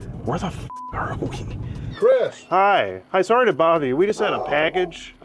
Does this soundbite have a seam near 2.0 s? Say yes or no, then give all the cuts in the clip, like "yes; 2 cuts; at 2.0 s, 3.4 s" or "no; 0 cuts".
yes; 1 cut; at 2.0 s